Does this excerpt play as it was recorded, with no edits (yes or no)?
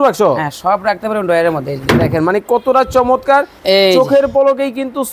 no